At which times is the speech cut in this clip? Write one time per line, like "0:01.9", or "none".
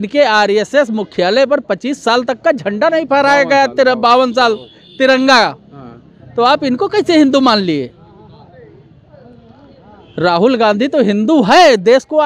none